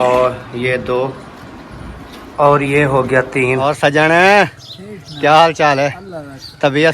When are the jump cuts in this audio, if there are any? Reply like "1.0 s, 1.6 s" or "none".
3.6 s